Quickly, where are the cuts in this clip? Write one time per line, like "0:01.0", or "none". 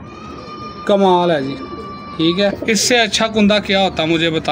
0:02.6